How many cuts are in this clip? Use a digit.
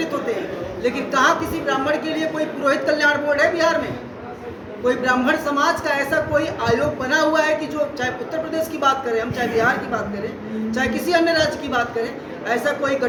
0